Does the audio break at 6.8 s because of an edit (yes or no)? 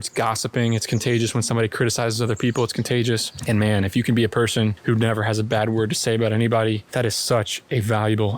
yes